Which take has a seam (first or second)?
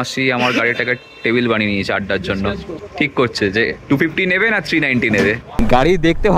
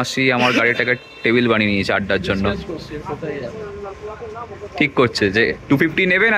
first